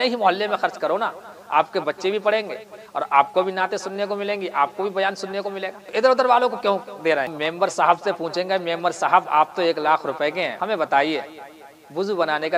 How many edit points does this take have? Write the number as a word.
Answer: three